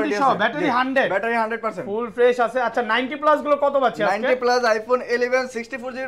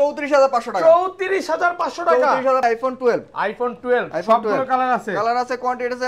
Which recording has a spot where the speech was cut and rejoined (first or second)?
second